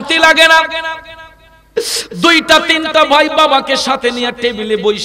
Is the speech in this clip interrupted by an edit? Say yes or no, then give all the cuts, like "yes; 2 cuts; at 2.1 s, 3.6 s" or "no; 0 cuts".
no; 0 cuts